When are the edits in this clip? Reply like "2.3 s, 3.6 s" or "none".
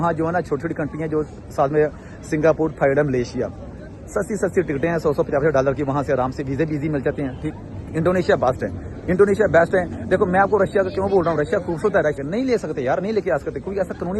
7.4 s, 12.2 s